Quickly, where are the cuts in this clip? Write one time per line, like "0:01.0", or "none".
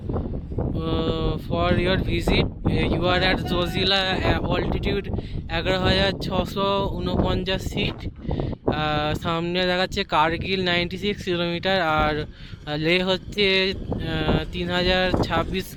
none